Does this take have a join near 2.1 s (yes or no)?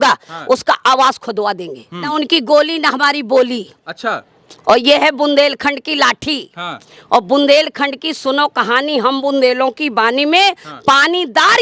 yes